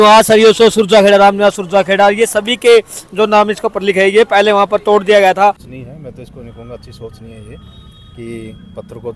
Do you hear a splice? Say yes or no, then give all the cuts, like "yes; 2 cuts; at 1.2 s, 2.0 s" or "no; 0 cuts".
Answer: yes; 1 cut; at 5.7 s